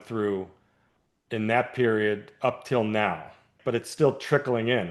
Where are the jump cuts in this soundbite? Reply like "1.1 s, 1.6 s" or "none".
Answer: 3.5 s

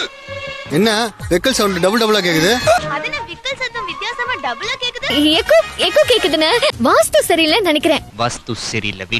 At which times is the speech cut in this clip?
2.8 s, 5.1 s, 8.1 s

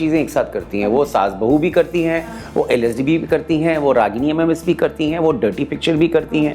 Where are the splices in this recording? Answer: none

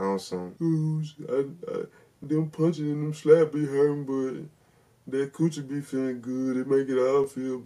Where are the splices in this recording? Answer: none

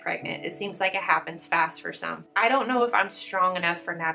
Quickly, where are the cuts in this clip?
2.3 s

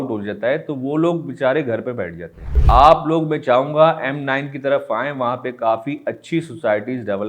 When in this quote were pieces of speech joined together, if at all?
2.6 s

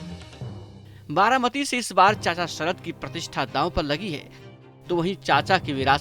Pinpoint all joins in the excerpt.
1.0 s

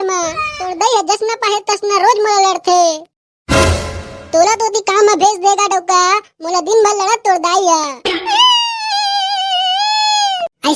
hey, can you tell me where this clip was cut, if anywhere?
none

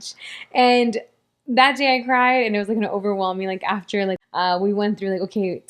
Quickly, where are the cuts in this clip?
4.2 s

